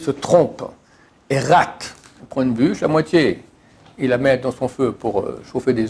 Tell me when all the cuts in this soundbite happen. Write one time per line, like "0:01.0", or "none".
0:02.2